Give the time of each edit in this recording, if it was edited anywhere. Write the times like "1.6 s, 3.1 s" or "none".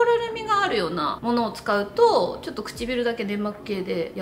none